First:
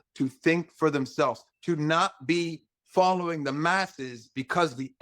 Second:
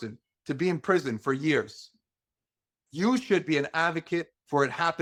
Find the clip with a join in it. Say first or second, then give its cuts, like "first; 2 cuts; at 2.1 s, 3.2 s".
first; 1 cut; at 1.5 s